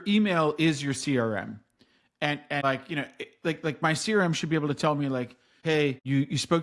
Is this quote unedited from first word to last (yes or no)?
no